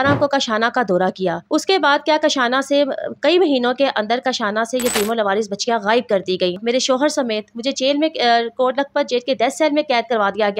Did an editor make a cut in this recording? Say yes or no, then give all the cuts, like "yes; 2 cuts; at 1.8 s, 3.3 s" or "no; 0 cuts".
yes; 2 cuts; at 1.4 s, 6.6 s